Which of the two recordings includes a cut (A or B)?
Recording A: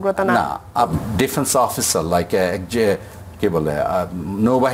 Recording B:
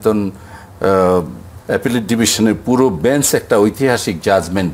A